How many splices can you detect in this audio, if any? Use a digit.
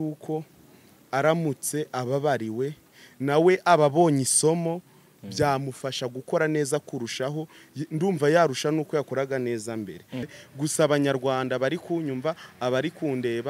1